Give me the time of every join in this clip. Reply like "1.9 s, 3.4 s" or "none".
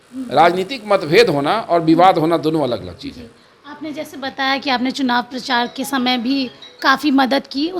none